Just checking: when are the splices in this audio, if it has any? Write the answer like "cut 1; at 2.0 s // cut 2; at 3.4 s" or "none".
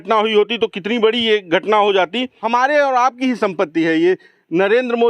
cut 1; at 2.3 s